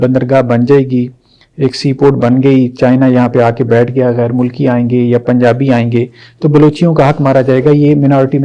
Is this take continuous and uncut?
yes; 0 cuts

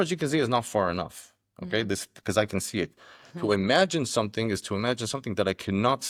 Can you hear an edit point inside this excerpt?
no; 0 cuts

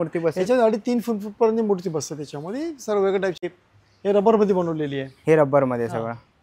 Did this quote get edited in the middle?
yes; 1 cut; at 3.4 s

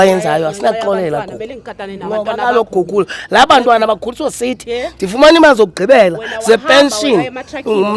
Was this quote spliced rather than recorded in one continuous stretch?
no; 0 cuts

